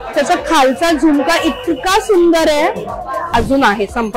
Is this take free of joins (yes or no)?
no